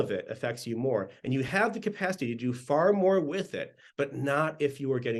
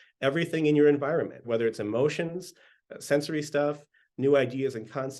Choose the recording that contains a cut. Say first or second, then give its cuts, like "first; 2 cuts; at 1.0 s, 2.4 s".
second; 1 cut; at 1.4 s